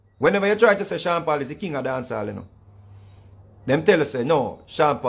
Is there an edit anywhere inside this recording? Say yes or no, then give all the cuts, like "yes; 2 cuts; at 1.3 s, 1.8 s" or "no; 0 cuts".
no; 0 cuts